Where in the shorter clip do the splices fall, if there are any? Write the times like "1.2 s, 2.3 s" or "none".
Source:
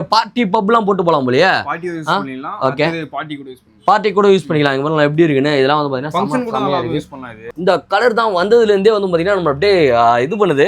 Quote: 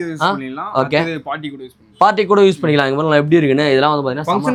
none